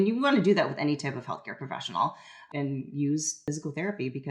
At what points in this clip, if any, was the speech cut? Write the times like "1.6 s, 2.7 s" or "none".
2.4 s, 3.4 s